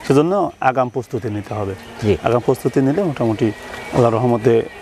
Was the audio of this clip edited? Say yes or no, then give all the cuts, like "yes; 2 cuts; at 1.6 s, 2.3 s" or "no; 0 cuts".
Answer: no; 0 cuts